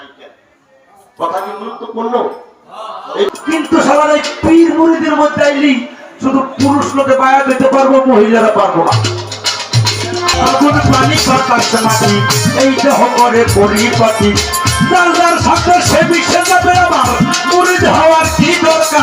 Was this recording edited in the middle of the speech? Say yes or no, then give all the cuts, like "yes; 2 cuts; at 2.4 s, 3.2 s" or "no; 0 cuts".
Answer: yes; 2 cuts; at 3.3 s, 10.4 s